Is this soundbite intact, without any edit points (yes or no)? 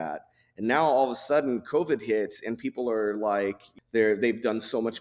no